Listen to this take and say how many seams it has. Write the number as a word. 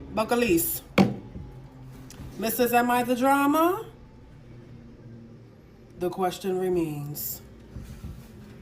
zero